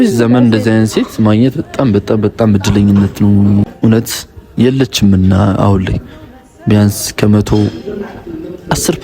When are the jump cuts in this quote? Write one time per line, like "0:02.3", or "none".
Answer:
0:03.7